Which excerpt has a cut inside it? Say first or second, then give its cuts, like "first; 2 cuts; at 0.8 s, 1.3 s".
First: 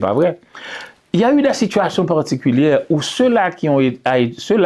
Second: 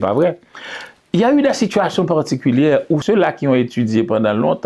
second; 1 cut; at 3.0 s